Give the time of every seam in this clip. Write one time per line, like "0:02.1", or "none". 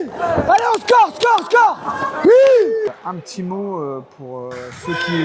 0:03.0